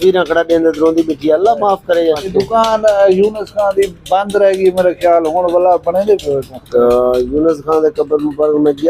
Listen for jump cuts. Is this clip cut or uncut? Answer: cut